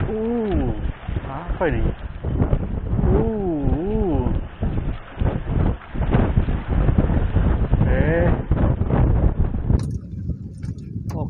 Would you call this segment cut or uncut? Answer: cut